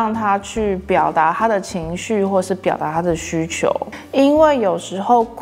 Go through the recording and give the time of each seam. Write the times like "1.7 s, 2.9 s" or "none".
3.9 s